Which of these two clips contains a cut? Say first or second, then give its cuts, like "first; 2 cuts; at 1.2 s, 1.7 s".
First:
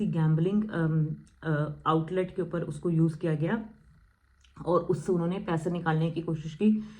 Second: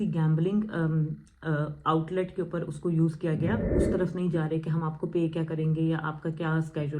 second; 1 cut; at 3.7 s